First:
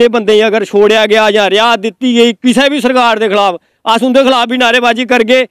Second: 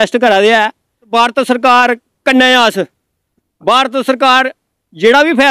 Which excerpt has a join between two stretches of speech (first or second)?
second